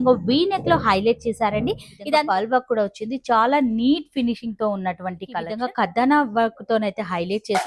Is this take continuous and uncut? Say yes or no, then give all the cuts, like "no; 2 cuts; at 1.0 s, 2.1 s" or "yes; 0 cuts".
no; 2 cuts; at 1.9 s, 5.5 s